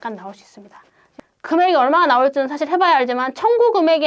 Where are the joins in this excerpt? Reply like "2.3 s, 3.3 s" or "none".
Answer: 1.1 s